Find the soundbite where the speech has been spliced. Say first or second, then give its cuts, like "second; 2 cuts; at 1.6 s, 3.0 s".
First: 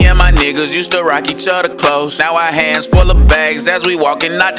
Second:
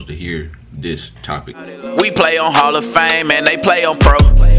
second; 1 cut; at 1.6 s